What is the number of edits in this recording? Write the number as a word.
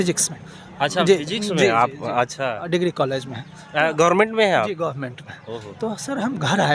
zero